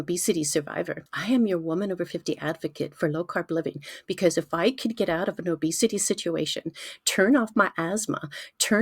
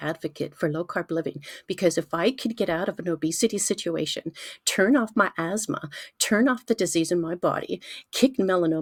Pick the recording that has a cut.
first; 1 cut; at 1.1 s

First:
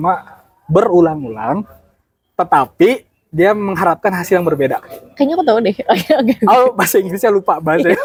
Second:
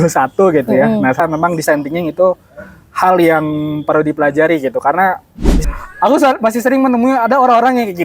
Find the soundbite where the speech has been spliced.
second; 2 cuts; at 1.2 s, 5.5 s

